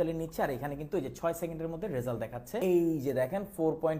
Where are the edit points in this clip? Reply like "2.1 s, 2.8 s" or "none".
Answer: 2.6 s